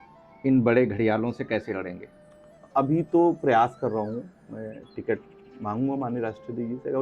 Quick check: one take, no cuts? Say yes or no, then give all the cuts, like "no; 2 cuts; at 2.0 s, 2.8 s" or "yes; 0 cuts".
no; 1 cut; at 2.7 s